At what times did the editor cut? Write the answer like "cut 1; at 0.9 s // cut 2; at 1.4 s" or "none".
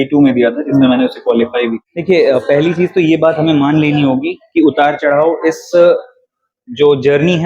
cut 1; at 1.8 s

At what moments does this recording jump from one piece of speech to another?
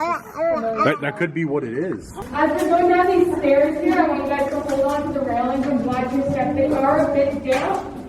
cut 1; at 2.2 s

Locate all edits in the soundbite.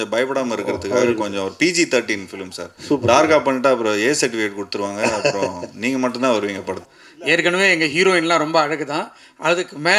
cut 1; at 6.9 s

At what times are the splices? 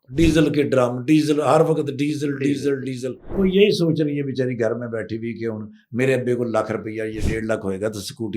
cut 1; at 3.2 s

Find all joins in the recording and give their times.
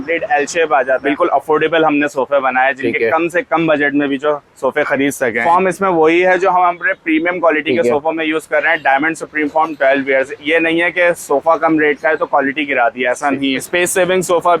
cut 1; at 1.0 s // cut 2; at 5.4 s // cut 3; at 13.7 s

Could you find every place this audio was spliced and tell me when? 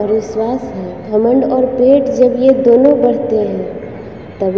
cut 1; at 1.0 s

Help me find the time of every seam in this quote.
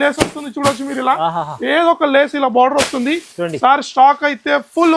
none

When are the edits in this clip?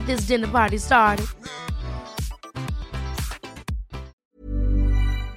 cut 1; at 4.2 s

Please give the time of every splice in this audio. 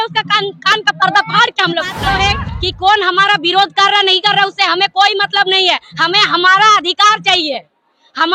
cut 1; at 2.0 s

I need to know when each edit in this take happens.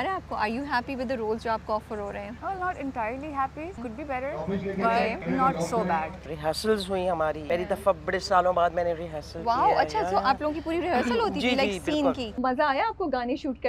cut 1; at 2.3 s // cut 2; at 3.8 s // cut 3; at 5.2 s // cut 4; at 6.3 s // cut 5; at 7.4 s // cut 6; at 12.3 s

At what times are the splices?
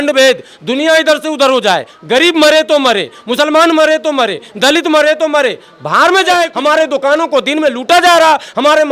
cut 1; at 6.5 s

